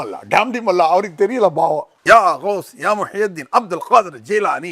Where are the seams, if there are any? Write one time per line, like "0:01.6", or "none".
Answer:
none